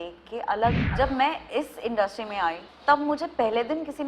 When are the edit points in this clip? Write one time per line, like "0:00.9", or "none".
0:00.8
0:02.7